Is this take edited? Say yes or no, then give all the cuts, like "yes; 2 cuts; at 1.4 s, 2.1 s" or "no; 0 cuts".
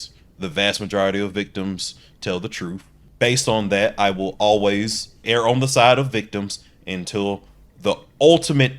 yes; 2 cuts; at 3.0 s, 5.2 s